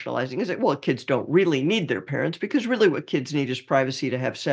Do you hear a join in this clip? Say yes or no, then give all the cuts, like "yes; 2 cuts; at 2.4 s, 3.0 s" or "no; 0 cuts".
no; 0 cuts